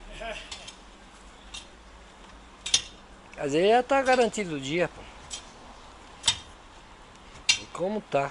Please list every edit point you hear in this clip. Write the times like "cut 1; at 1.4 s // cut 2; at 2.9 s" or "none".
none